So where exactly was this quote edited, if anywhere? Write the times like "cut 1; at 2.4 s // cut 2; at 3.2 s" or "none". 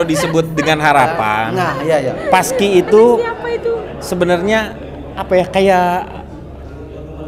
none